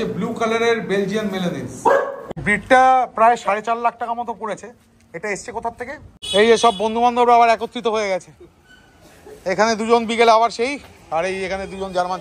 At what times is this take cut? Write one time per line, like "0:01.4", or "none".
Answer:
0:02.2
0:06.3